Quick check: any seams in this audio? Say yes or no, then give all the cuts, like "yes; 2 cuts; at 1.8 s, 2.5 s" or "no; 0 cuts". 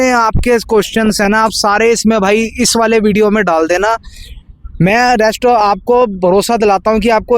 no; 0 cuts